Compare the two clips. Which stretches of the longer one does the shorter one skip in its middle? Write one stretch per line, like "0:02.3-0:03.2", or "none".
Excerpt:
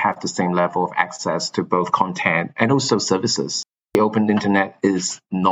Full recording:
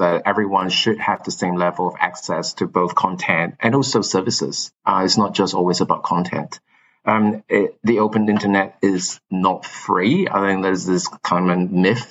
0:04.9-0:07.8

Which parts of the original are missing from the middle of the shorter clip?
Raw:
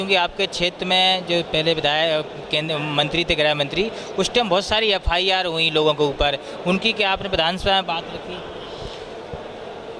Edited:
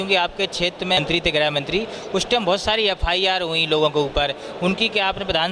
0:01.0-0:03.0

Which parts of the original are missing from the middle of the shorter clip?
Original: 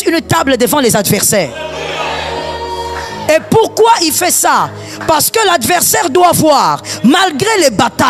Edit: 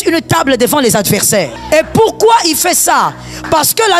0:01.6-0:03.1

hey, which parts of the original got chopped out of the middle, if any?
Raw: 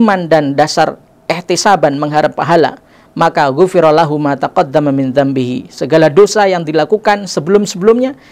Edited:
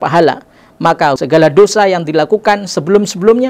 0:03.5-0:05.8

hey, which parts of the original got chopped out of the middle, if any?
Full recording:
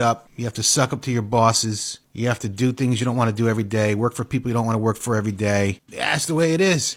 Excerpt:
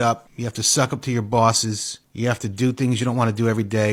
none

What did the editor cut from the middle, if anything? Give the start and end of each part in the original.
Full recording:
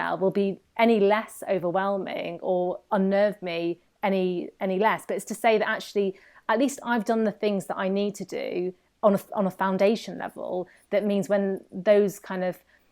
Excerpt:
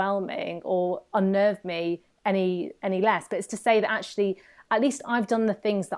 none

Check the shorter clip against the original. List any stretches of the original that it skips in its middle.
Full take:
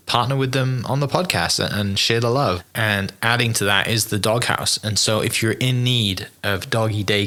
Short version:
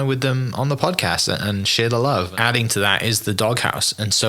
0:02.6-0:03.2

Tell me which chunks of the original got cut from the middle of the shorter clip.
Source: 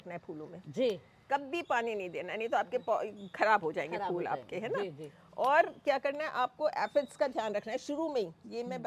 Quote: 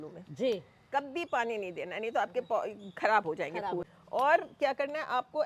0:04.2-0:05.1

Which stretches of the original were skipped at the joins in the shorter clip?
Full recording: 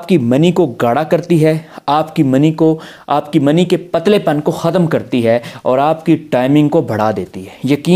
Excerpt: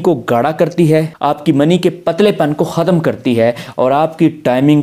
0:01.6-0:03.0

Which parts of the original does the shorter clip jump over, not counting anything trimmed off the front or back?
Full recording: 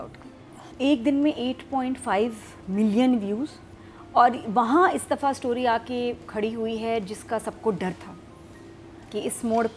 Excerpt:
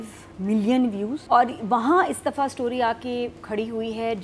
0:03.4-0:04.0

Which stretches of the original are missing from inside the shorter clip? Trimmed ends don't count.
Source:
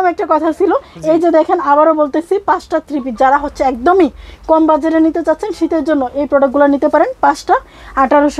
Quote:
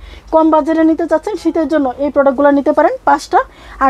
none

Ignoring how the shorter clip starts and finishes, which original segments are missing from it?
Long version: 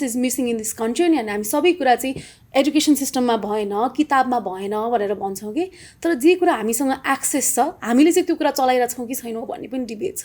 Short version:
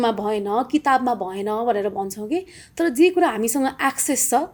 none

